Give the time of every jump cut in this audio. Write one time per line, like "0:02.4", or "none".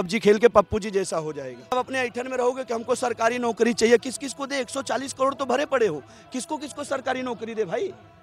0:01.7